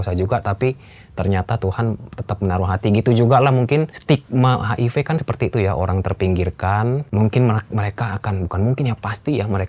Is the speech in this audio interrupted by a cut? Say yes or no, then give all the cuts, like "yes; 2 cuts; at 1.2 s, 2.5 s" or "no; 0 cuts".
yes; 2 cuts; at 4.0 s, 7.0 s